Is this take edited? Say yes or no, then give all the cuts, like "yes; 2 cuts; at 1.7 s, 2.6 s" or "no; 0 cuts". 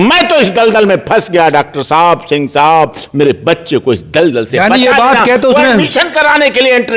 no; 0 cuts